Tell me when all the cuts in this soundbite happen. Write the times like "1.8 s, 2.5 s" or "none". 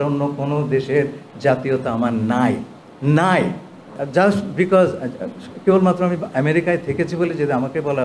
4.0 s